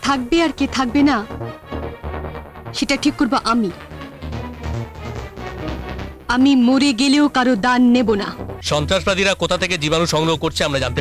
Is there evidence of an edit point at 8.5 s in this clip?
yes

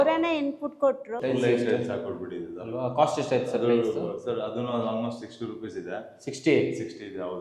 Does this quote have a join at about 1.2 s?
yes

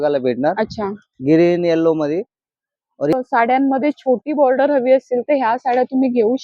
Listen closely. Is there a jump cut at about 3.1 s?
yes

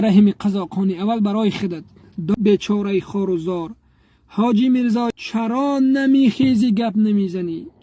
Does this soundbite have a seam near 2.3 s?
yes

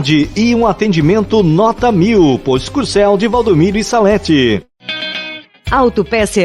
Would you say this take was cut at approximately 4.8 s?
yes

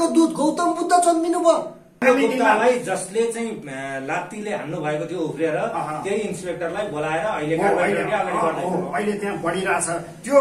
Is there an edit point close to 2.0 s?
yes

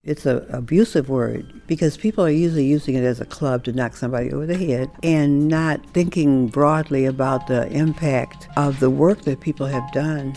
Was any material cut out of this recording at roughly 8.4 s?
yes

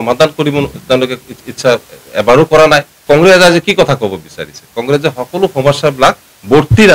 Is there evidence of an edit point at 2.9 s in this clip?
yes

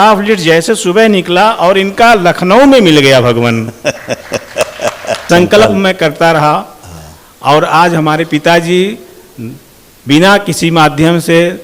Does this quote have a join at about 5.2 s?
yes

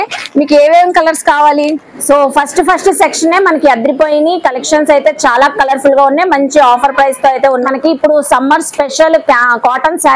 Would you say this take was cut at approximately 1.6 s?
yes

